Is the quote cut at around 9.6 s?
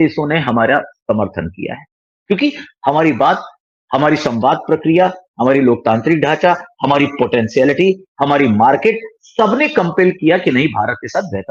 no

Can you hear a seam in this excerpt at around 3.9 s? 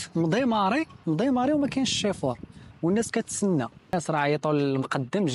yes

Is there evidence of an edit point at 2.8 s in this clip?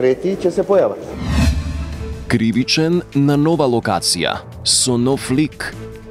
no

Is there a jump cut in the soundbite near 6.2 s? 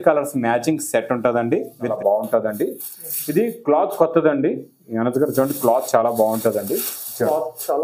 no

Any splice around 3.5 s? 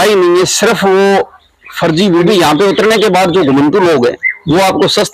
no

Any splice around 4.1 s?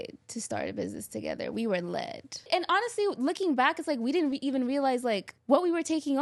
no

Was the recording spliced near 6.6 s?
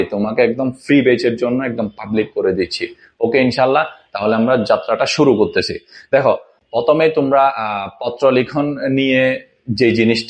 no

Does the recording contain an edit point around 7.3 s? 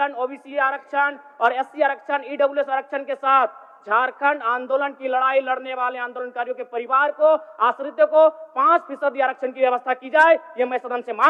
no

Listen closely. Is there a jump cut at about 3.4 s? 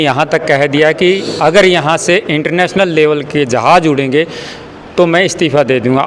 no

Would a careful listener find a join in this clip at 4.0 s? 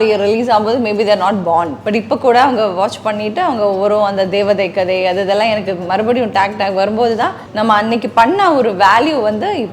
no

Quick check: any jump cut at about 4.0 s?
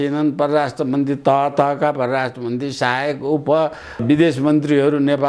yes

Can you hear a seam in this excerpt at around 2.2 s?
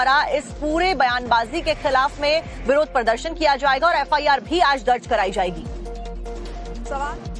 no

